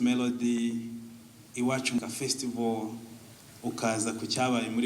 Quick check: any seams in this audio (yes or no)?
yes